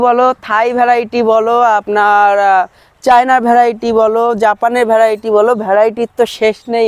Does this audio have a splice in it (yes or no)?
no